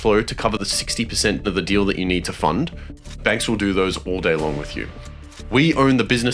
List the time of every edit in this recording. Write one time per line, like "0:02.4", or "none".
0:03.2
0:05.3